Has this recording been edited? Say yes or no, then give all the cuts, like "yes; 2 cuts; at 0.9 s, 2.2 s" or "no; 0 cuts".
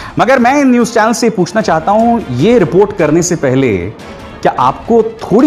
no; 0 cuts